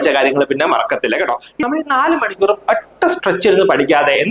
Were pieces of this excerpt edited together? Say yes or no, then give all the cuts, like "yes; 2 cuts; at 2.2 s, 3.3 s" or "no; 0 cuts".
yes; 1 cut; at 1.6 s